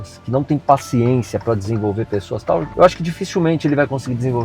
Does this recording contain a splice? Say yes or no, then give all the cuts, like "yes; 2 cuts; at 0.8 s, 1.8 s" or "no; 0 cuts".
yes; 1 cut; at 2.7 s